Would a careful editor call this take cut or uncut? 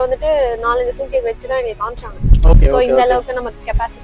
uncut